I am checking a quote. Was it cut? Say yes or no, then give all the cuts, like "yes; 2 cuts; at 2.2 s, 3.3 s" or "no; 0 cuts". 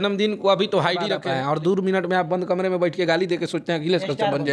yes; 1 cut; at 1.2 s